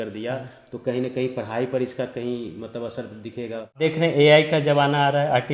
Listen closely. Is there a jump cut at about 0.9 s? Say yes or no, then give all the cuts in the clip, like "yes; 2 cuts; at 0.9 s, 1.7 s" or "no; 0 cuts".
no; 1 cut; at 3.8 s